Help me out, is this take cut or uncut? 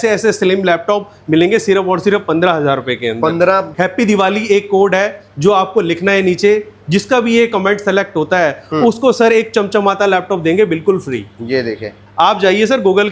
cut